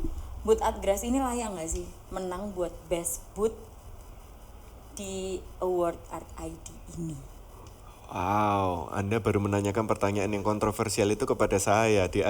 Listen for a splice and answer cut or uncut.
uncut